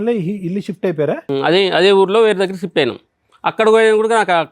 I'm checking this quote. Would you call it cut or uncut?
cut